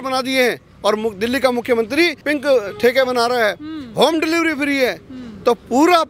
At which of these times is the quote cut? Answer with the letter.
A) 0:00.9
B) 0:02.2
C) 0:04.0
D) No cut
B